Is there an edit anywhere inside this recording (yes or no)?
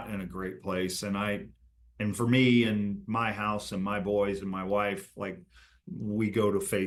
no